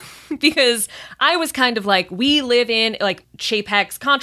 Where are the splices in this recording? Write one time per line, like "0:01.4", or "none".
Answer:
0:03.3